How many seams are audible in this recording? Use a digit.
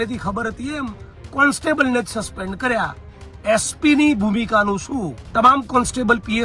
1